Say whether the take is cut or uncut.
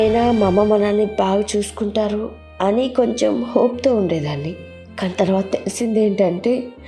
uncut